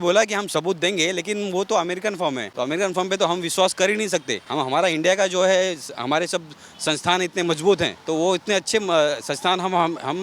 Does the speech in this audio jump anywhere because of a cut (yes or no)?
yes